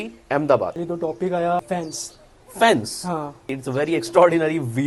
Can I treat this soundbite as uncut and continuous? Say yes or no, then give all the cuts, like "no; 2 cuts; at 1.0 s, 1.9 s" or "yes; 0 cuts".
no; 3 cuts; at 0.8 s, 1.6 s, 3.5 s